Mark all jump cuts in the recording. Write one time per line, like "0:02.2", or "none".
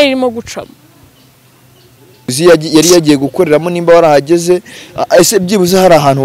0:02.3

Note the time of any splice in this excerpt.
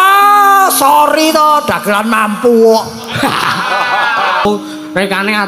0:04.5

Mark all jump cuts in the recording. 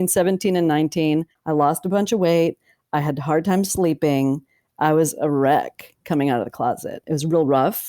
0:01.4

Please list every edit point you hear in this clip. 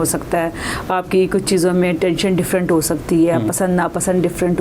none

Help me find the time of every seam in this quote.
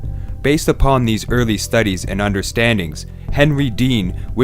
0:02.4

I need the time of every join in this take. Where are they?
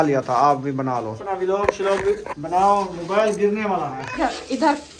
0:01.1
0:04.0

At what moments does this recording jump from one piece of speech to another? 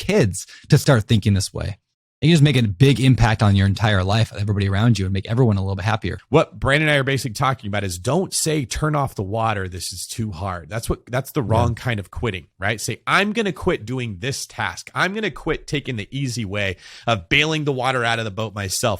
0:06.1

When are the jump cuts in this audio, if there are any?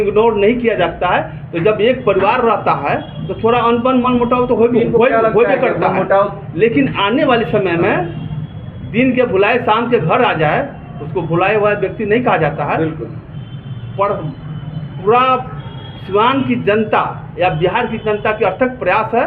none

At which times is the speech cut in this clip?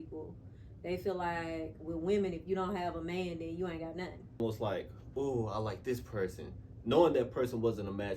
0:04.4

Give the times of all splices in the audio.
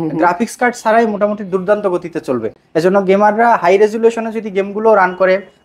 none

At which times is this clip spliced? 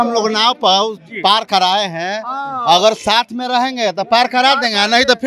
none

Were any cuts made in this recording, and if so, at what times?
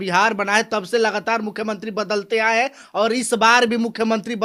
none

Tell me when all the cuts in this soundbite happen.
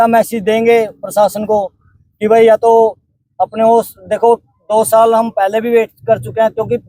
none

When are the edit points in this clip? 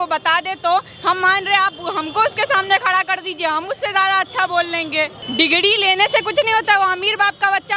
0:05.2

